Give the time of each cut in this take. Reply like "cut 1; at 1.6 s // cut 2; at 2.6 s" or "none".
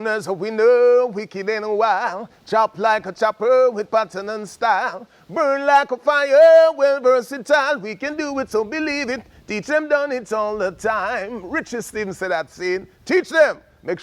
none